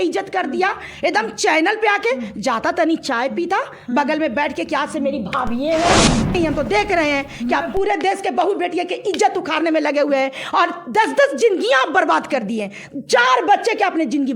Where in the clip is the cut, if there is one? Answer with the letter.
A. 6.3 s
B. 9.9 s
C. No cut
A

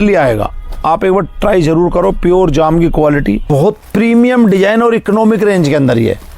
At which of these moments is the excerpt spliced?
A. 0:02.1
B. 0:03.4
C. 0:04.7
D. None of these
B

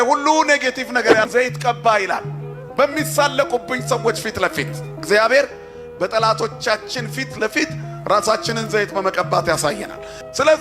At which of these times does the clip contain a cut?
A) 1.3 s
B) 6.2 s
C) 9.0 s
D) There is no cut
A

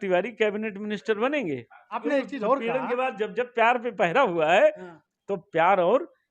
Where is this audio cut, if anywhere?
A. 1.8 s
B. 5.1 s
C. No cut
A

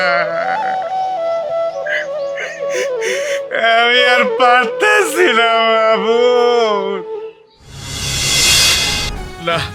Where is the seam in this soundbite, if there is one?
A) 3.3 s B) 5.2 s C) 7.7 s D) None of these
D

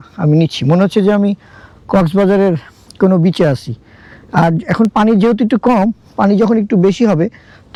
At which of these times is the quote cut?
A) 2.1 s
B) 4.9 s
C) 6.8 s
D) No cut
D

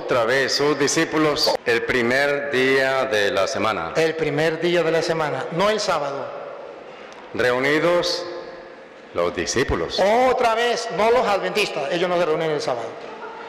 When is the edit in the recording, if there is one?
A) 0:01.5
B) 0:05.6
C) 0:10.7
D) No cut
A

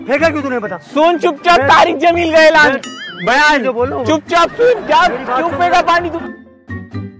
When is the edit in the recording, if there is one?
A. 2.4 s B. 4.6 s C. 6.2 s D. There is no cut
C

